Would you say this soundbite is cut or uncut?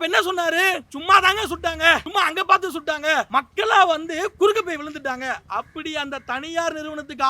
cut